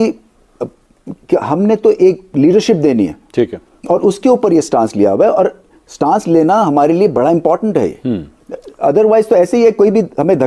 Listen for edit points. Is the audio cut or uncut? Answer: uncut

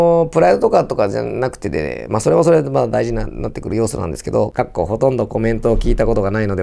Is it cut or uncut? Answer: cut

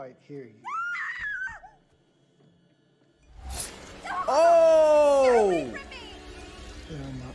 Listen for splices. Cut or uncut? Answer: uncut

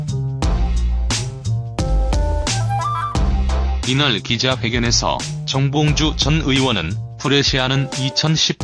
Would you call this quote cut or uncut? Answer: uncut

